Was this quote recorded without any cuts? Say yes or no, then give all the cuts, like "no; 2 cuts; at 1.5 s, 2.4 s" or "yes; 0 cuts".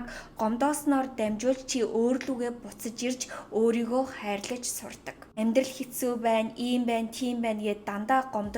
no; 1 cut; at 5.2 s